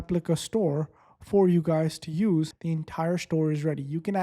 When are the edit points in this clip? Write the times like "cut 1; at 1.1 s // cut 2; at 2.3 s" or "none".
cut 1; at 2.6 s

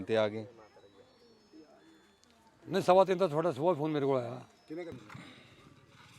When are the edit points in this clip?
cut 1; at 4.9 s

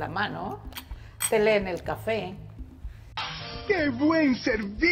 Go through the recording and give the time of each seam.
none

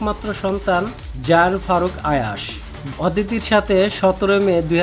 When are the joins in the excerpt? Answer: cut 1; at 2.8 s

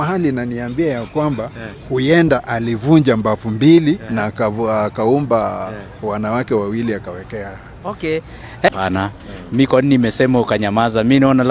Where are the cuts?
cut 1; at 8.7 s

